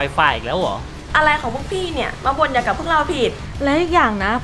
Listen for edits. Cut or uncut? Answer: cut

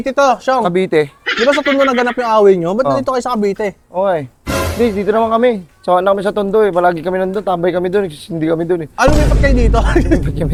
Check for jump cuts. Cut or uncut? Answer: uncut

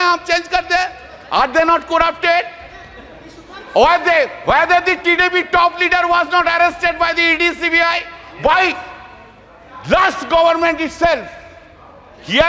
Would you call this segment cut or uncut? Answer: uncut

